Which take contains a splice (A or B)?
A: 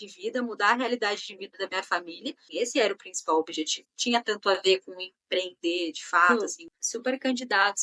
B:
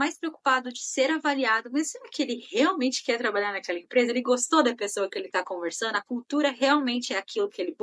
A